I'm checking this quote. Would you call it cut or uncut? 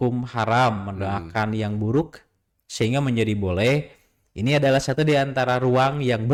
uncut